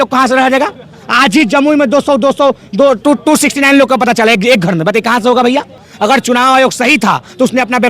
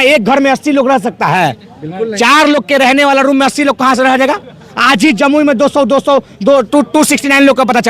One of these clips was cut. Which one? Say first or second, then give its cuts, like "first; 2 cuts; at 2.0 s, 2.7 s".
first; 1 cut; at 5.8 s